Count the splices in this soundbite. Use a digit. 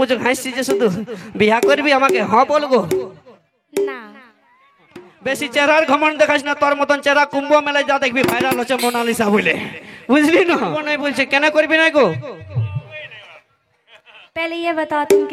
2